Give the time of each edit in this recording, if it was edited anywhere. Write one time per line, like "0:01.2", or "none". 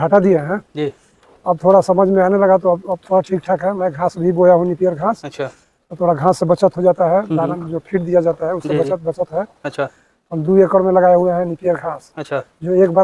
none